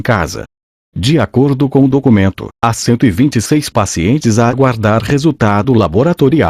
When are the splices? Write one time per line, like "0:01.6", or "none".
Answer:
none